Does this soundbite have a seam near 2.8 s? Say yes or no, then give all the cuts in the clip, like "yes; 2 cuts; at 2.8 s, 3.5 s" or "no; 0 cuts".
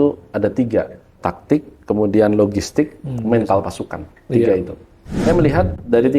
no; 2 cuts; at 1.2 s, 5.1 s